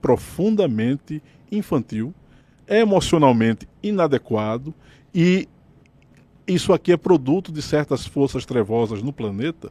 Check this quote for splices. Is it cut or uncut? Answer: uncut